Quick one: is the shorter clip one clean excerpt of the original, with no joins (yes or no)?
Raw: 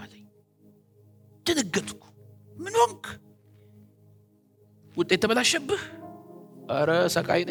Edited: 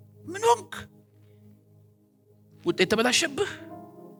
yes